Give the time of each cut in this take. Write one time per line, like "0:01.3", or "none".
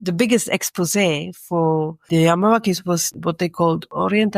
0:03.1